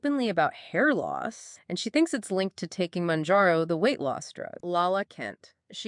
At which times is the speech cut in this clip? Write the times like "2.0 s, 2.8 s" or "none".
4.6 s